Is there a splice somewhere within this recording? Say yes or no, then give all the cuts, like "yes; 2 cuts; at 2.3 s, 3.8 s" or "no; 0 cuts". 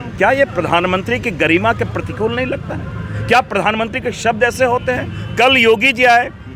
no; 0 cuts